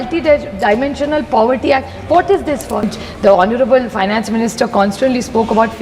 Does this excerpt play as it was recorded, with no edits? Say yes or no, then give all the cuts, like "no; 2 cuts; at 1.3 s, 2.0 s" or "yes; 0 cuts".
no; 1 cut; at 3.0 s